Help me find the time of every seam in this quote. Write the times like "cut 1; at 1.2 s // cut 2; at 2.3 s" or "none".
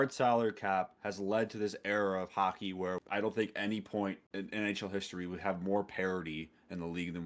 cut 1; at 3.0 s // cut 2; at 4.2 s